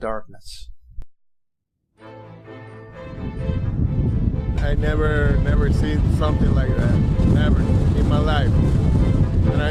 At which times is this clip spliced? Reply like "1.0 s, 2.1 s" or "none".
none